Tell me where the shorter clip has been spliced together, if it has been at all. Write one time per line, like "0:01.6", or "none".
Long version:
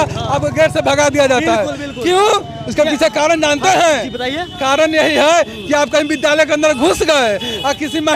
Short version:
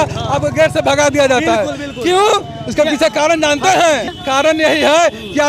0:04.1

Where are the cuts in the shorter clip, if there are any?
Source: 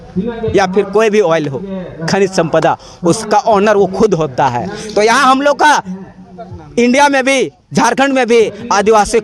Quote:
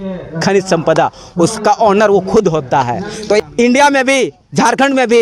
0:03.4

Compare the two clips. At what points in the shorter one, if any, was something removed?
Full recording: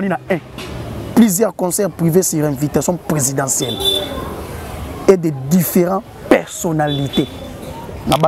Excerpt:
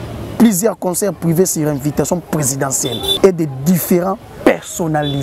0:03.1

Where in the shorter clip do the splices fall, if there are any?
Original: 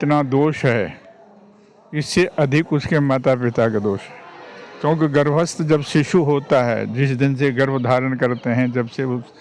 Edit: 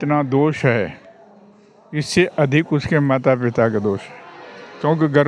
none

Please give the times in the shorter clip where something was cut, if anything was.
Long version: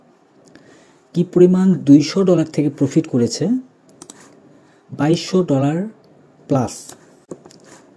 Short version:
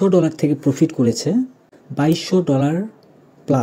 0:02.1

